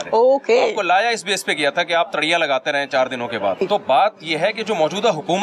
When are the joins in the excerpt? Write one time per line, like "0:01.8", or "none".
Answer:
0:03.6